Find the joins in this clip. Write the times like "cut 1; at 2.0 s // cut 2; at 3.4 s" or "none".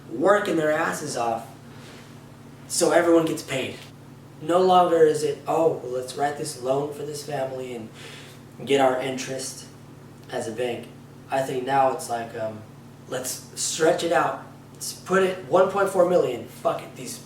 none

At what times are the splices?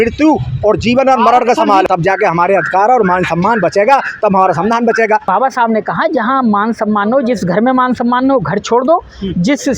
cut 1; at 1.9 s // cut 2; at 5.2 s

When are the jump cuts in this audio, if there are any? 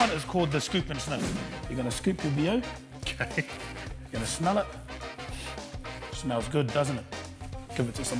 none

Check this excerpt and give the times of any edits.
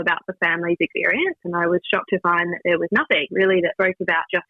cut 1; at 1.3 s

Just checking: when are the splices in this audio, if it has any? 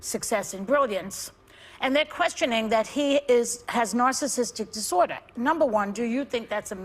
none

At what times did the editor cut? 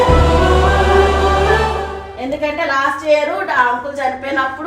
cut 1; at 2.1 s

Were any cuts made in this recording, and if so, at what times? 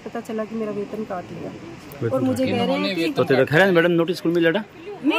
none

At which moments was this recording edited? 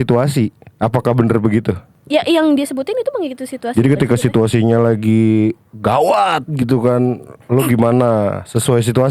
cut 1; at 1.9 s

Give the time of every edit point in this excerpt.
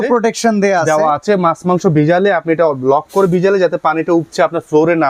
none

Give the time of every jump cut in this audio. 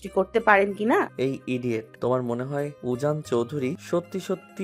cut 1; at 1.5 s // cut 2; at 2.8 s // cut 3; at 3.8 s

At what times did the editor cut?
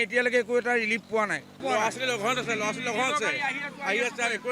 cut 1; at 1.6 s

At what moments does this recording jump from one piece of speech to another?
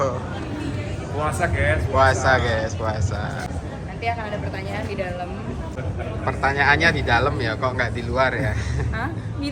cut 1; at 3.5 s // cut 2; at 5.8 s

